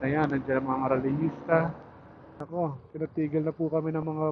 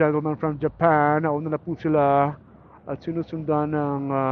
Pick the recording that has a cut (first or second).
first